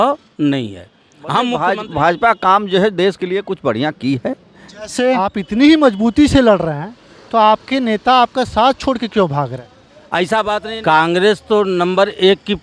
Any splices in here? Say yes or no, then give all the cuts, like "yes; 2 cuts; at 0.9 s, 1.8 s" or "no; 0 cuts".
yes; 3 cuts; at 1.6 s, 5.4 s, 10.7 s